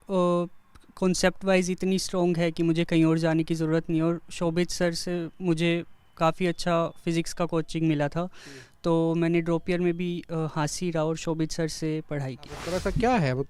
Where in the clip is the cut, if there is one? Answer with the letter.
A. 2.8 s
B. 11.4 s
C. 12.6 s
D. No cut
C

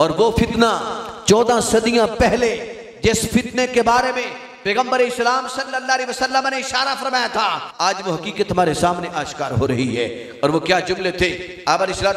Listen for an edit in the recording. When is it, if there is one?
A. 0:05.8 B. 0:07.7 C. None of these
B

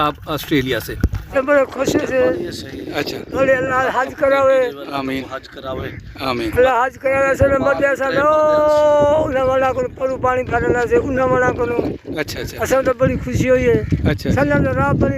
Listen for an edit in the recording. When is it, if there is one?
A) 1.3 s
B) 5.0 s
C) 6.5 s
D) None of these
A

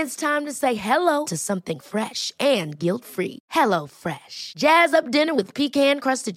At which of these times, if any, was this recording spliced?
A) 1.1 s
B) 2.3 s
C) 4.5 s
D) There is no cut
D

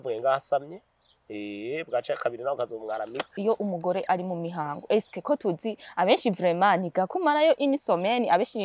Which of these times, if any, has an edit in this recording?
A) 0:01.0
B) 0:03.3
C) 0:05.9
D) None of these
B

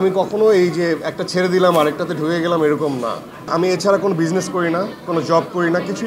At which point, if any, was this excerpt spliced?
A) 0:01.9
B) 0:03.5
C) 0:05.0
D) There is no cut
B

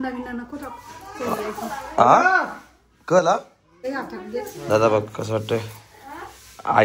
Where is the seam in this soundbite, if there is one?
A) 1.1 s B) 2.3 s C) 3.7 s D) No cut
C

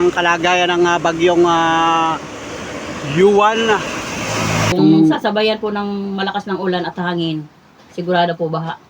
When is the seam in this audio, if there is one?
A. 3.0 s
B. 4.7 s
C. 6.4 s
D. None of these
B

